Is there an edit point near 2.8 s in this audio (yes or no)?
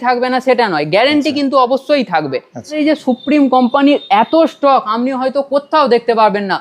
yes